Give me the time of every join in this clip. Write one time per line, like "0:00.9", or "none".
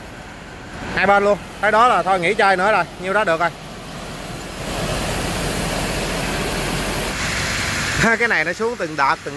0:07.1